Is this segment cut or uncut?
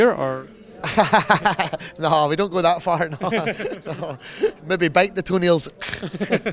uncut